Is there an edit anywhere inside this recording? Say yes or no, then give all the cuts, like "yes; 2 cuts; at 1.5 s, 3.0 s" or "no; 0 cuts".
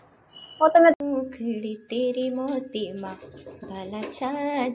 yes; 1 cut; at 1.0 s